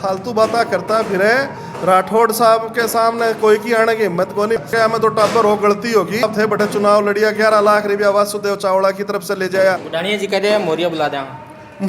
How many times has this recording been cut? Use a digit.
3